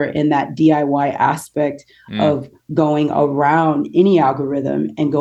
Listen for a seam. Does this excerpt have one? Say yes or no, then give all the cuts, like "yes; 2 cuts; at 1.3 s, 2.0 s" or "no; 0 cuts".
no; 0 cuts